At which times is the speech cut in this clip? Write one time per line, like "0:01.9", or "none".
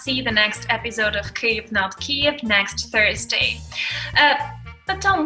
none